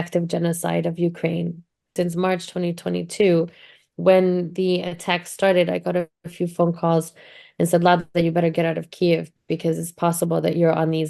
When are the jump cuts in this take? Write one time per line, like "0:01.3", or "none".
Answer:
0:01.9